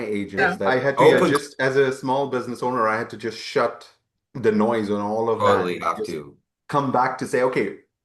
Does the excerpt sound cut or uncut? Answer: cut